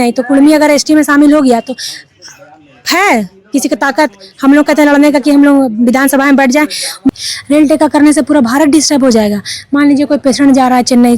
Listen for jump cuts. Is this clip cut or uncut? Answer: cut